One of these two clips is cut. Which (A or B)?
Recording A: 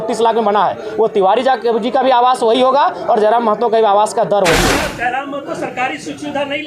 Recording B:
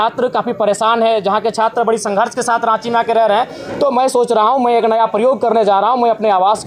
A